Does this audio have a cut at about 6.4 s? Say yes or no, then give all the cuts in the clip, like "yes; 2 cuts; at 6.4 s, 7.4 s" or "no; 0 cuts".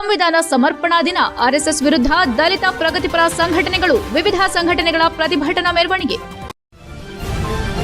yes; 1 cut; at 6.4 s